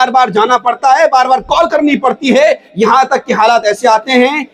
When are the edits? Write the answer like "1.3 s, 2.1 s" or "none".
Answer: none